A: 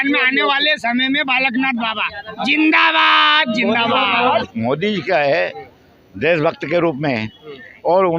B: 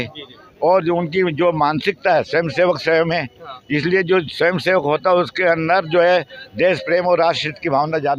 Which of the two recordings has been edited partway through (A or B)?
A